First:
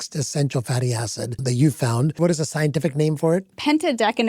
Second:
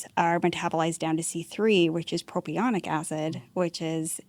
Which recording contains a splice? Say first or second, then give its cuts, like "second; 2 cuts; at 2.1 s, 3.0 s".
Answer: first; 2 cuts; at 1.4 s, 2.2 s